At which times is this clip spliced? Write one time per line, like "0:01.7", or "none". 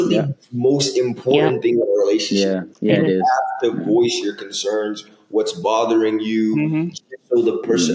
none